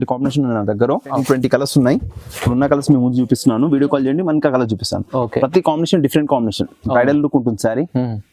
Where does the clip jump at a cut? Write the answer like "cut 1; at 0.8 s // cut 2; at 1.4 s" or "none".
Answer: cut 1; at 1.1 s